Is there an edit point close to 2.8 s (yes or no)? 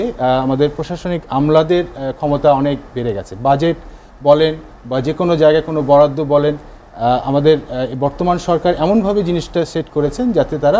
no